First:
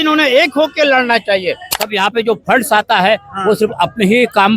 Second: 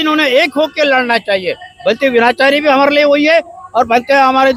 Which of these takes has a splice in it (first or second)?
first